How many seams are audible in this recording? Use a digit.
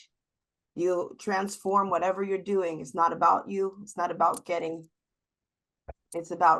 0